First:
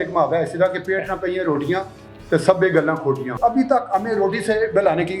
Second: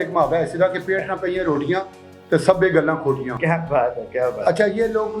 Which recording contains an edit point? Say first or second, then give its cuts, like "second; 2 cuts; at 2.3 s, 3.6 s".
first; 1 cut; at 3.3 s